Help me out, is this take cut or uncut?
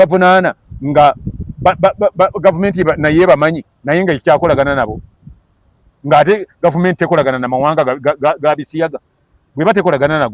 uncut